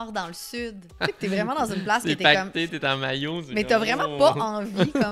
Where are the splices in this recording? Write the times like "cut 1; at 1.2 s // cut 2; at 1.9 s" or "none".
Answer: cut 1; at 0.9 s